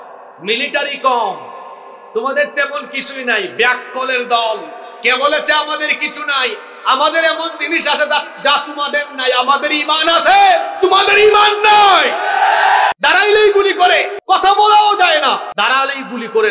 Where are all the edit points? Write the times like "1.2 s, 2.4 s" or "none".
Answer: 12.9 s, 14.1 s, 15.5 s

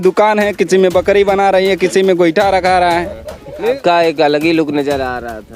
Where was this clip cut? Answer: 3.7 s

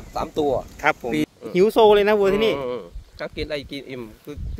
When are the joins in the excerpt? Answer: 1.3 s

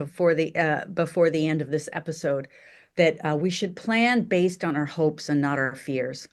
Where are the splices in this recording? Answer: none

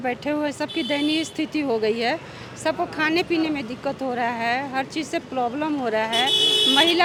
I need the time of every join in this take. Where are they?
none

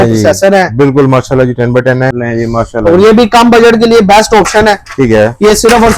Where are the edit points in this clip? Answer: 2.2 s

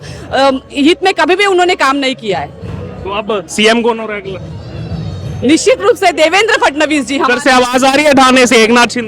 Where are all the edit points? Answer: none

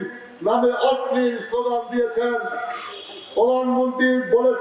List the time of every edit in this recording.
none

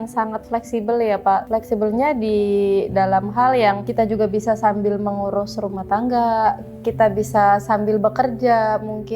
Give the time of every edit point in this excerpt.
1.5 s, 3.8 s

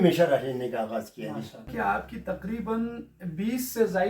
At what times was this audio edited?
1.7 s

